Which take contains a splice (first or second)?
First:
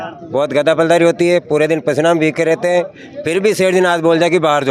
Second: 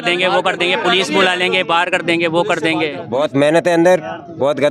second